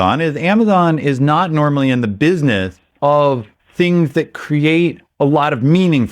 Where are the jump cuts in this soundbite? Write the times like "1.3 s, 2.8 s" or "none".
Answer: 2.8 s, 3.6 s, 5.0 s